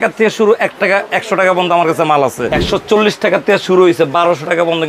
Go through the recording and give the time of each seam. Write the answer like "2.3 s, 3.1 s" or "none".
2.5 s

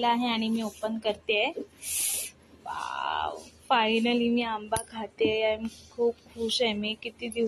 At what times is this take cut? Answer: none

